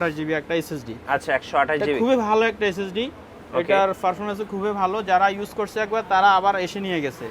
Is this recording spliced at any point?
no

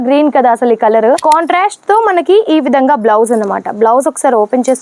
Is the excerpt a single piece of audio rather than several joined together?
no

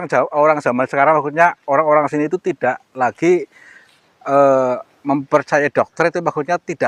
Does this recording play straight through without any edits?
yes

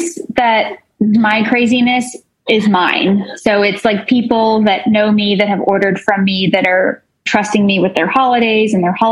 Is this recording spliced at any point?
no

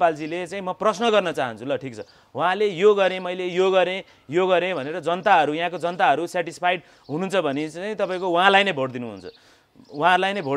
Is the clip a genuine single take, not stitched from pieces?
yes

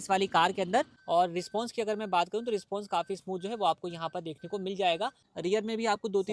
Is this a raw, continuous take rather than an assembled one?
no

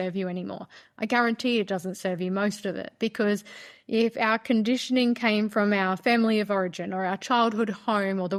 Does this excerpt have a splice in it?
no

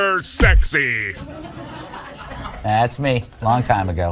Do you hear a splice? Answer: no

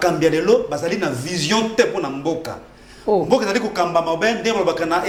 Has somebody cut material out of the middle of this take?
no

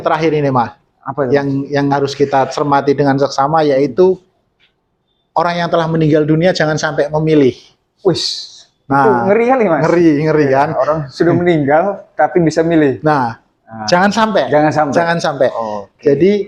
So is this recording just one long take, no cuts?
yes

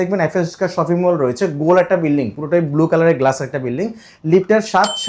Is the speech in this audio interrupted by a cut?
no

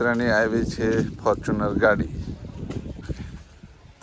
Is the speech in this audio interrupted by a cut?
no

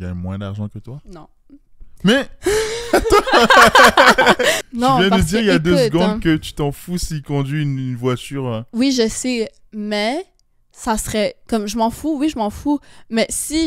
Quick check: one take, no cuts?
no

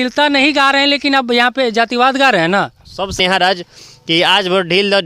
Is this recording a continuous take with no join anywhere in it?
no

